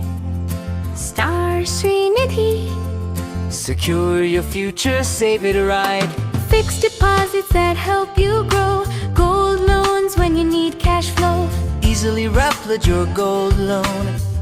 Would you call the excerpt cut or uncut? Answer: uncut